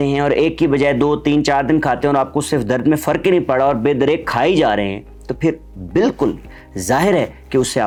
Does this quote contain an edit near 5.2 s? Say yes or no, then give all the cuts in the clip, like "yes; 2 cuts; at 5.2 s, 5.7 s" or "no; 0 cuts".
no; 0 cuts